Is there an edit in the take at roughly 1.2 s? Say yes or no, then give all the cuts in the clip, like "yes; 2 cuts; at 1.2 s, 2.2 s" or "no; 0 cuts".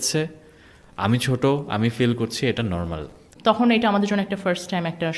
no; 1 cut; at 3.2 s